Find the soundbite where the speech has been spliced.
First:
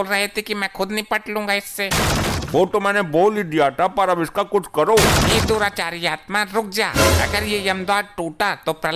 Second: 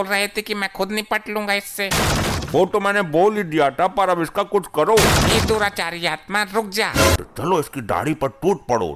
second; 1 cut; at 7.2 s

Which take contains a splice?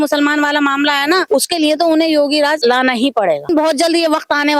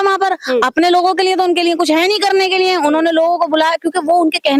first; 3 cuts; at 1.2 s, 2.6 s, 3.5 s

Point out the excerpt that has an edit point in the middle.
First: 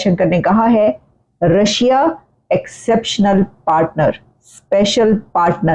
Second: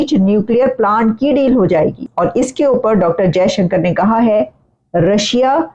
second; 1 cut; at 2.1 s

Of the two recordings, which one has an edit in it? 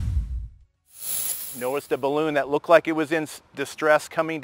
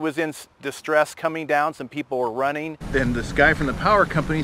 second; 1 cut; at 2.8 s

